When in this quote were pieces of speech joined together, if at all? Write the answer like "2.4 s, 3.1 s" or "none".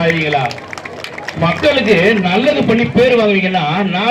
none